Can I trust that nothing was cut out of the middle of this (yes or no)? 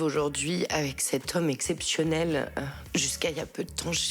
no